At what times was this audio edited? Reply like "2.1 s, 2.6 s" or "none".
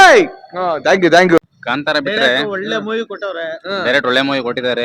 1.4 s